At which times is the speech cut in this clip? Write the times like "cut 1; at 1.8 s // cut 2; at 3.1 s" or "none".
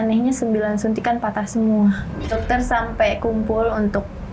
cut 1; at 2.3 s

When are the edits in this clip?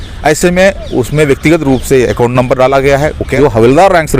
cut 1; at 3.3 s

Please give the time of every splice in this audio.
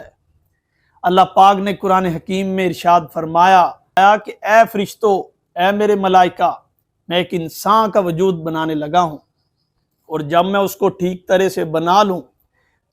cut 1; at 4.0 s

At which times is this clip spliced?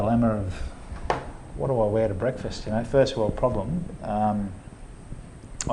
none

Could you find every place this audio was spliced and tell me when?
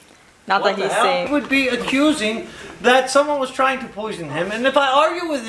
cut 1; at 1.3 s

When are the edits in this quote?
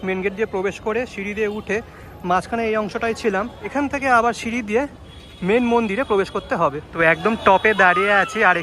cut 1; at 3.7 s // cut 2; at 7.0 s

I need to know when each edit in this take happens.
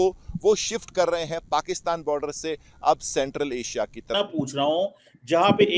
cut 1; at 4.1 s

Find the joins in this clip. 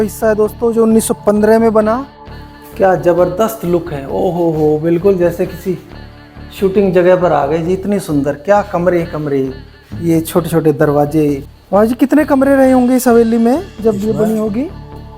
cut 1; at 2.2 s // cut 2; at 11.5 s

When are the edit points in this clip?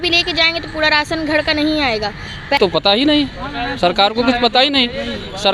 cut 1; at 2.6 s

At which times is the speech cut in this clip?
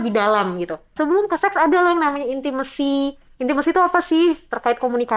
cut 1; at 0.9 s

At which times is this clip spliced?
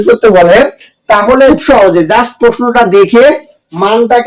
cut 1; at 1.5 s

